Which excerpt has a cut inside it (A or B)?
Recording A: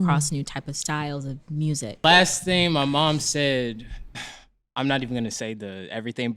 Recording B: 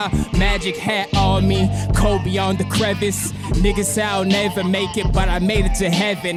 A